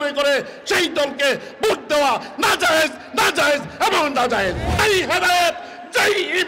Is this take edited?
yes; 1 cut; at 4.6 s

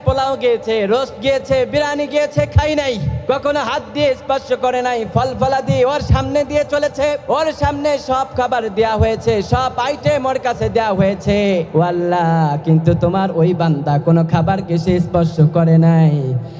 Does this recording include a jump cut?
no; 0 cuts

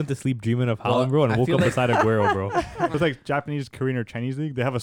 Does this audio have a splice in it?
yes; 1 cut; at 2.9 s

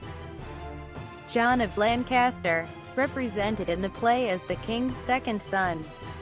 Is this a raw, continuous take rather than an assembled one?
no; 1 cut; at 2.3 s

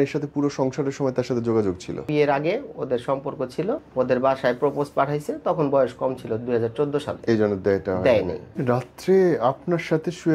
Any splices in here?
yes; 3 cuts; at 2.1 s, 3.9 s, 8.4 s

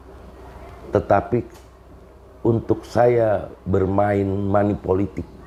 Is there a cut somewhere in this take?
no; 0 cuts

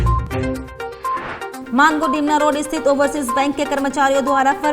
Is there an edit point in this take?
yes; 1 cut; at 1.6 s

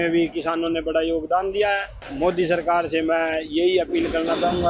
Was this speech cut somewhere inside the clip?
yes; 1 cut; at 2.0 s

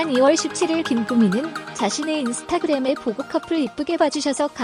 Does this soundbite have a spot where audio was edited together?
no; 0 cuts

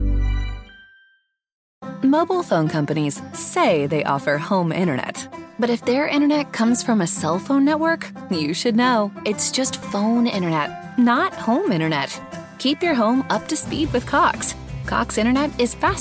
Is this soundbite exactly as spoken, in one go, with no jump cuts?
no; 1 cut; at 1.6 s

